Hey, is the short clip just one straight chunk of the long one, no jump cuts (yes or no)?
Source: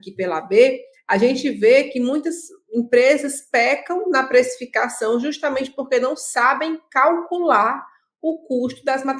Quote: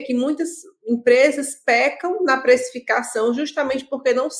yes